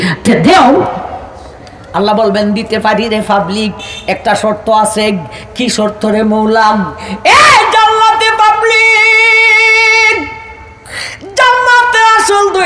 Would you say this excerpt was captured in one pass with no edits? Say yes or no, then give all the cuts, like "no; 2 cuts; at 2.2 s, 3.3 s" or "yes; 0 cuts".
yes; 0 cuts